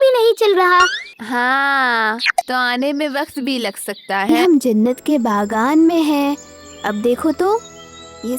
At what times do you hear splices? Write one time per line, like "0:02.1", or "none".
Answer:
0:01.1
0:02.5
0:04.3